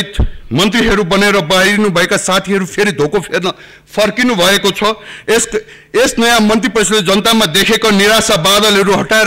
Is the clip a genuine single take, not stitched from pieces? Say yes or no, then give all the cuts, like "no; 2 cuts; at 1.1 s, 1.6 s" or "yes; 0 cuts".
yes; 0 cuts